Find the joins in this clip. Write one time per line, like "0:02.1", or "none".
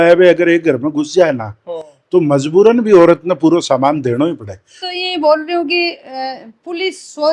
0:04.9